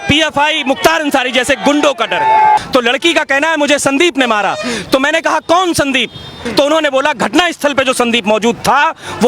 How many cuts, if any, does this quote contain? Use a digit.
2